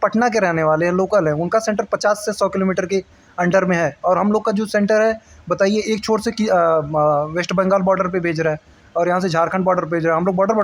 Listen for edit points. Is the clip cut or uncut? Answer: uncut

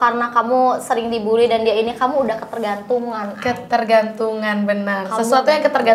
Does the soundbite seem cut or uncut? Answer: uncut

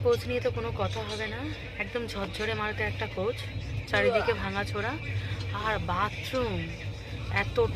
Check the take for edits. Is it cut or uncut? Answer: uncut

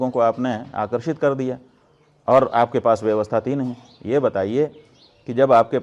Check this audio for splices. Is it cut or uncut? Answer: uncut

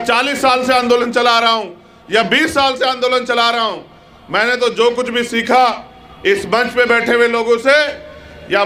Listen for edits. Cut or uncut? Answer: uncut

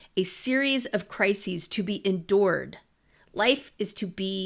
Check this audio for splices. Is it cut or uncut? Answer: uncut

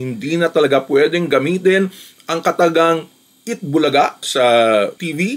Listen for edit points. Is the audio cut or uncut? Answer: uncut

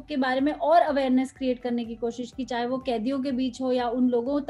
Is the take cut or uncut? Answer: uncut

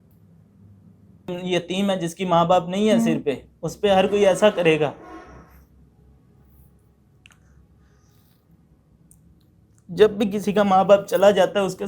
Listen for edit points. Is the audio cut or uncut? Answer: cut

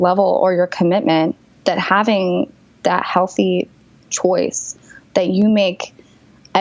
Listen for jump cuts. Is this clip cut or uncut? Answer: cut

